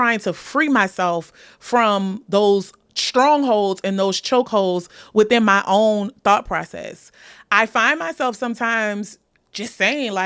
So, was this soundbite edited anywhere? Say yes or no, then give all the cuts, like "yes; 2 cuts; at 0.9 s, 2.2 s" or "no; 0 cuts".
no; 0 cuts